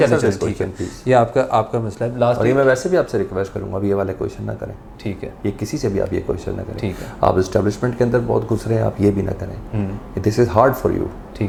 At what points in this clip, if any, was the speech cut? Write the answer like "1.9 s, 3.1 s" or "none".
none